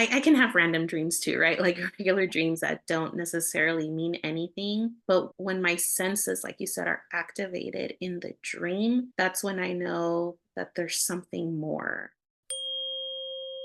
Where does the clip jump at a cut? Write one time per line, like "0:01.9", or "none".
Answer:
0:12.2